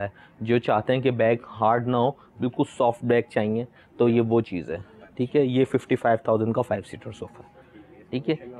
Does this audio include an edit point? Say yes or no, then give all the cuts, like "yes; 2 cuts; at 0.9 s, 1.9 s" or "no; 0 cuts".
no; 0 cuts